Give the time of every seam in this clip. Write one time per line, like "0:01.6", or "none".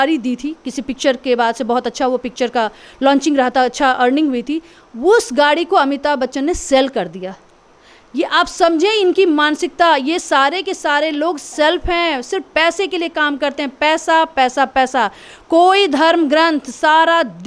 none